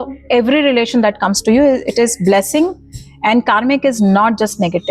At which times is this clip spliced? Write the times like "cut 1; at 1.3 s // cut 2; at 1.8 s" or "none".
none